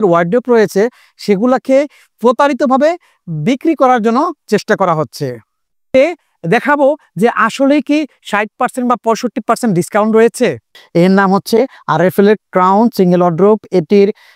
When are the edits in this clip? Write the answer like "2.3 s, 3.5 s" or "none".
5.9 s, 10.7 s